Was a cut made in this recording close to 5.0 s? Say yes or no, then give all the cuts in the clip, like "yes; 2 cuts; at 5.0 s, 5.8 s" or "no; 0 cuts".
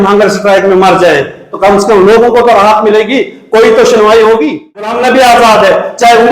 yes; 1 cut; at 5.0 s